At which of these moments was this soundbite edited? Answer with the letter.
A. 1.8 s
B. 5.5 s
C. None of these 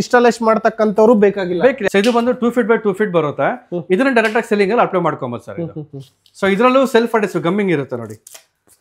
A